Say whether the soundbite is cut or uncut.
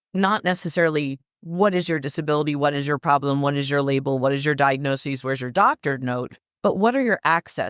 uncut